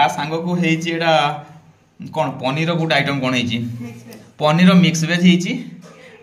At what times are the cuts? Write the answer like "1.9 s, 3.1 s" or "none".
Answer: none